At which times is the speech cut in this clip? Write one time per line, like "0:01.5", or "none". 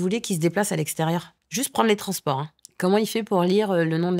0:01.4
0:02.6